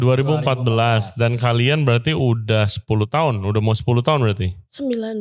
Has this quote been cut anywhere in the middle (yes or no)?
no